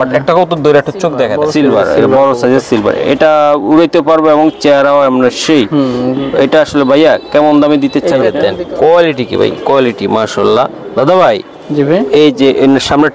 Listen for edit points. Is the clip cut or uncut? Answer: cut